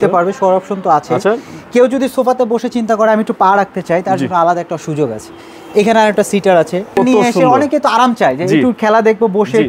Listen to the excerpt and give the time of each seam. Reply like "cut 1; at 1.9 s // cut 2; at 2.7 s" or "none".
cut 1; at 7.0 s